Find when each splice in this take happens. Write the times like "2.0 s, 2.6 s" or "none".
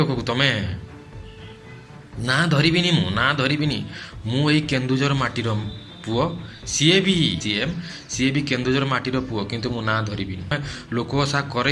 7.4 s, 10.5 s